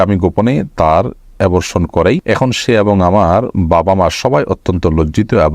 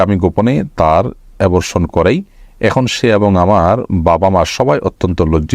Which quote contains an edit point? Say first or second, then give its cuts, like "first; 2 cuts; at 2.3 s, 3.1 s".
first; 1 cut; at 2.2 s